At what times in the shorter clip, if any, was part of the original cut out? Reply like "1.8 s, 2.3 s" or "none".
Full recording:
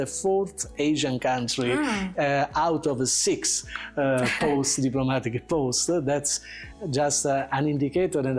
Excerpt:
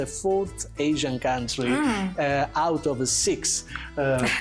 none